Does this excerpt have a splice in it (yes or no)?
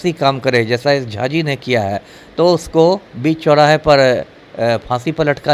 no